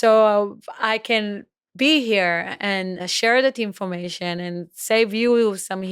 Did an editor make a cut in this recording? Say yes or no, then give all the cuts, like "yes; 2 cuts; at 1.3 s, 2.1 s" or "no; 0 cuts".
yes; 1 cut; at 3.1 s